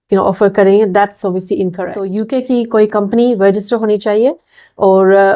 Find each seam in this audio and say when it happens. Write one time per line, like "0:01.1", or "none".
0:02.2